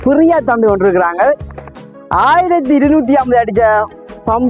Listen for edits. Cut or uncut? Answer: cut